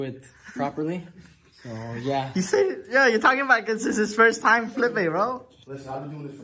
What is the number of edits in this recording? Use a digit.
0